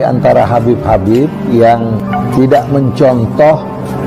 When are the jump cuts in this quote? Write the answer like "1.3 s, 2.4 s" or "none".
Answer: 2.0 s

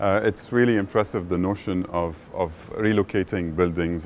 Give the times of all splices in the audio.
none

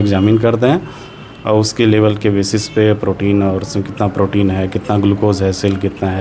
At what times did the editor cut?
none

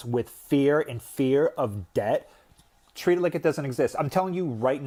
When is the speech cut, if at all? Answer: none

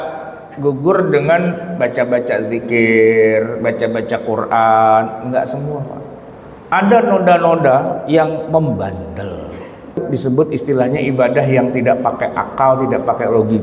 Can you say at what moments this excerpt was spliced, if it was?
10.0 s

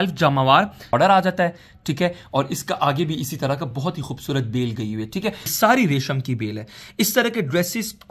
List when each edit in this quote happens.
0.9 s, 5.5 s

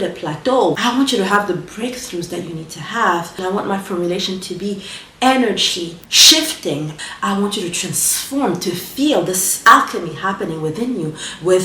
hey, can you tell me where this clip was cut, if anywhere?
0.8 s, 3.3 s, 6.1 s, 6.9 s

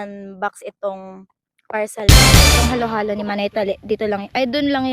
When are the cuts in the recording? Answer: 2.1 s, 2.6 s

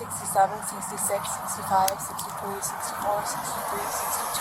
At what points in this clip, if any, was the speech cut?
none

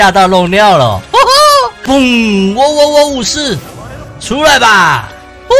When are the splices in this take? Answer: 1.8 s

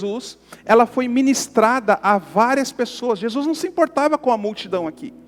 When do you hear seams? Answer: none

